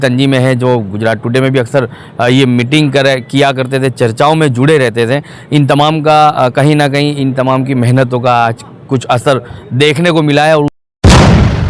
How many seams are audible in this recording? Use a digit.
1